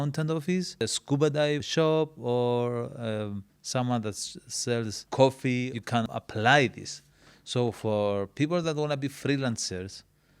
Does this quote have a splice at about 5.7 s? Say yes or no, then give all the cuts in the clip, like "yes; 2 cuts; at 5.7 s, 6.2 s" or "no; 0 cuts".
yes; 4 cuts; at 0.8 s, 1.6 s, 5.0 s, 5.7 s